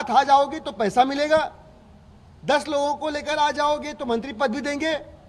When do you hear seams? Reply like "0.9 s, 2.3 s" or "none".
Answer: none